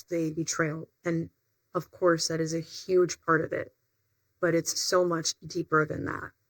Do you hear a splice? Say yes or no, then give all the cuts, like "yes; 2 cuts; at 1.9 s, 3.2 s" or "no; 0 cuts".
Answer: no; 0 cuts